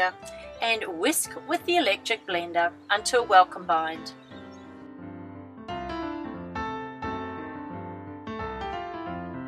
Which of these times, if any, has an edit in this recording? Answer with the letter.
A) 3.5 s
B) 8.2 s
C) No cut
C